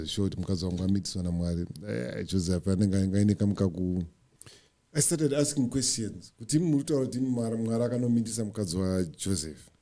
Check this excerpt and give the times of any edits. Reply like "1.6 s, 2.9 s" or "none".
4.2 s